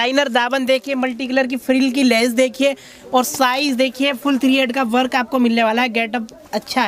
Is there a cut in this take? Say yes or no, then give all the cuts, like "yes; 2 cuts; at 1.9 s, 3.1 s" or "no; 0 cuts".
no; 0 cuts